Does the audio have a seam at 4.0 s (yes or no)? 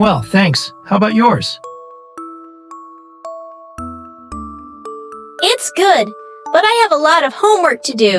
no